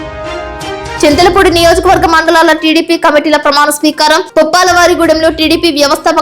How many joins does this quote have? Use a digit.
1